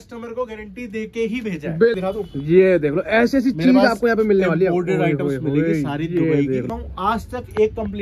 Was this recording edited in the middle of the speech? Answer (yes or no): yes